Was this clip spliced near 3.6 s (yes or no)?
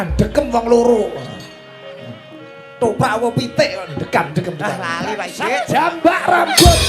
no